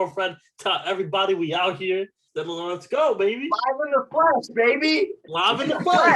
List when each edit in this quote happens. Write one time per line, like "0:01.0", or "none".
0:02.3